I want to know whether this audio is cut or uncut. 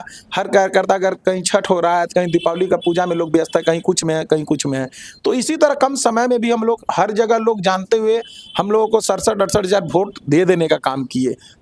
uncut